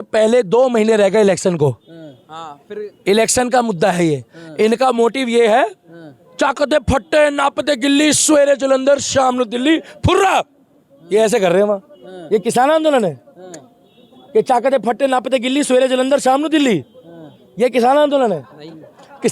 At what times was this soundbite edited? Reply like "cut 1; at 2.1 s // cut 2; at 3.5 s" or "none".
none